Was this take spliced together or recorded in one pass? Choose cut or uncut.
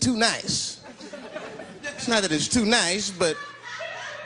cut